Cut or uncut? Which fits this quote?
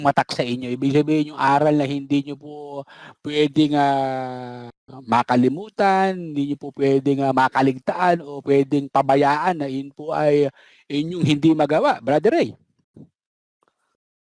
uncut